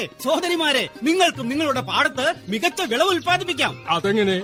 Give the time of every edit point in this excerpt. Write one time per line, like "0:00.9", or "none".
none